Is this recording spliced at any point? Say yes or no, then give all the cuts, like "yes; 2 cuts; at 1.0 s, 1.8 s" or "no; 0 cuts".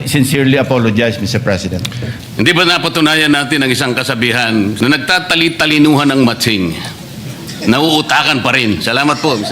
yes; 2 cuts; at 2.1 s, 4.8 s